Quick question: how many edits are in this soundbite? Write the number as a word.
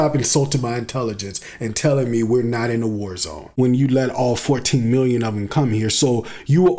one